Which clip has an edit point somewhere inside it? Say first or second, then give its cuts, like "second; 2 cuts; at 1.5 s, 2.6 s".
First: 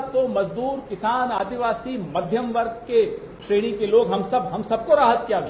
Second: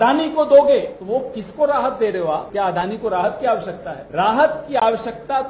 second; 3 cuts; at 1.0 s, 2.5 s, 3.9 s